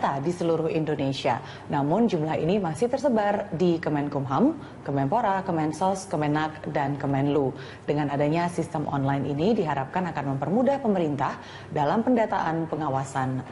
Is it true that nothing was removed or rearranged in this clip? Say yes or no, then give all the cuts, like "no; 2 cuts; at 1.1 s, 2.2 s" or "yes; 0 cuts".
no; 1 cut; at 9.8 s